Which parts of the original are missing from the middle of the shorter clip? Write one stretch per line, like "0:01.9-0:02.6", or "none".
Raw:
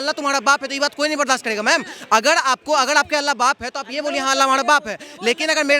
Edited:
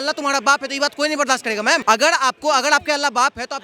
0:01.8-0:02.1